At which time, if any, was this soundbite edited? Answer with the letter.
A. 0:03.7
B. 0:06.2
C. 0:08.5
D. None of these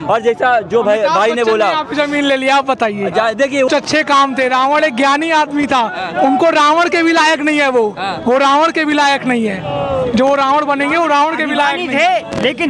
A